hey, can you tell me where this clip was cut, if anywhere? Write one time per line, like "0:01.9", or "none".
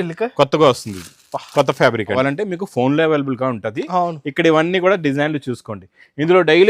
0:02.2